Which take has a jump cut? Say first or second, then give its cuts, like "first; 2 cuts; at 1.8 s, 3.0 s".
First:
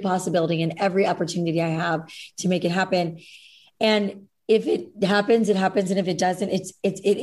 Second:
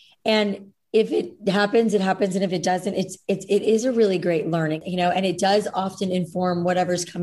second; 1 cut; at 4.8 s